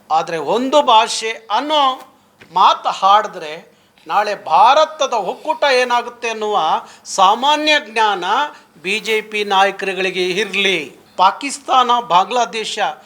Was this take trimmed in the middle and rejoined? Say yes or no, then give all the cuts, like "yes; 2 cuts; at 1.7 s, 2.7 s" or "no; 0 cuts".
yes; 1 cut; at 11.0 s